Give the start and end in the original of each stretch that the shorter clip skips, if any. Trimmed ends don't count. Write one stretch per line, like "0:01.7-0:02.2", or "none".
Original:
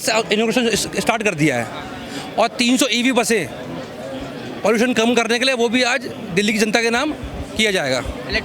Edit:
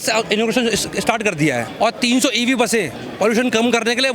0:01.7-0:02.2
0:03.6-0:04.4